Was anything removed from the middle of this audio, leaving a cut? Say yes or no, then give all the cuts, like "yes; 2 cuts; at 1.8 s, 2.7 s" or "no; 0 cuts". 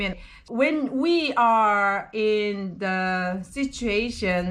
no; 0 cuts